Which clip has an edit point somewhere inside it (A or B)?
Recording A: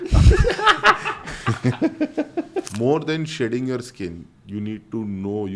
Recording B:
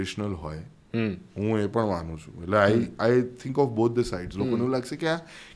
A